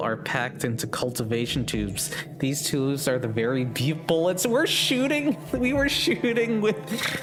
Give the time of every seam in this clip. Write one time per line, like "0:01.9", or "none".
none